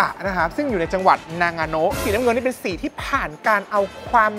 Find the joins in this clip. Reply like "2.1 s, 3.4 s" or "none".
2.0 s